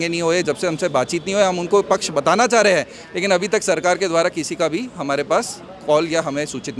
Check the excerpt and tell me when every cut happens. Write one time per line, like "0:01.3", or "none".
none